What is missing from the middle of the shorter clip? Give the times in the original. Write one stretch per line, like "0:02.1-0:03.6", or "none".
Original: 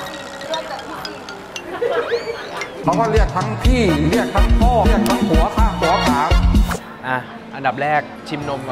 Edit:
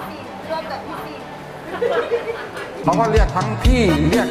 none